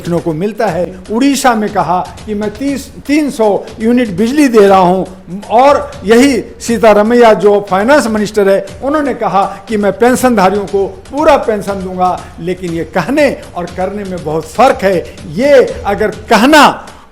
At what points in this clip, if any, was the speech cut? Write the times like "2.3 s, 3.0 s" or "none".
1.0 s